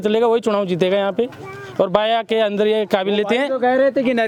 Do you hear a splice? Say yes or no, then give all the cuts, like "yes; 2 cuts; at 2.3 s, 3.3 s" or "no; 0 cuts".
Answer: no; 0 cuts